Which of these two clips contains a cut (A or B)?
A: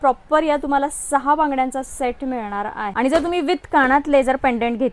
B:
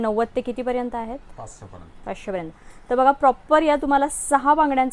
A